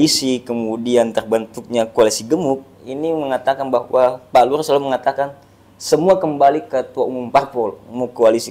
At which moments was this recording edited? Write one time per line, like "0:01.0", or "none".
none